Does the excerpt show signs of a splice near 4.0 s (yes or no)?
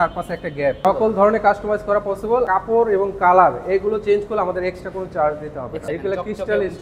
no